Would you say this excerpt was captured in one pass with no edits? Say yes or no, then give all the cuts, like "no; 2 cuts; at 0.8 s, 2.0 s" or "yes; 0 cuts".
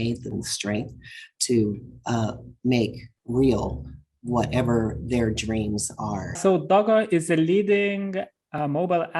no; 1 cut; at 6.4 s